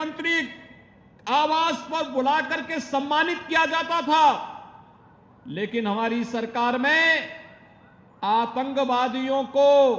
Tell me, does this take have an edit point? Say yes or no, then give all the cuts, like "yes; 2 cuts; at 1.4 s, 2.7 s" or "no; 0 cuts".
no; 0 cuts